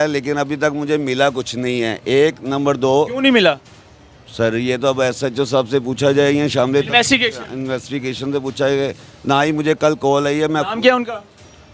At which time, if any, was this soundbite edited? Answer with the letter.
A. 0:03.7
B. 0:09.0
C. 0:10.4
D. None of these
D